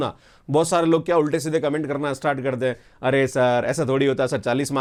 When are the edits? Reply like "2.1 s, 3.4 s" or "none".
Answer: none